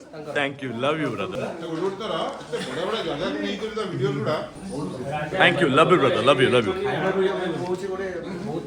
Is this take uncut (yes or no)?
no